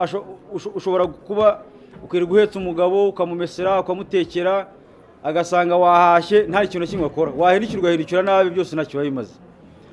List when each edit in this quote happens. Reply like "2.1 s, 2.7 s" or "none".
none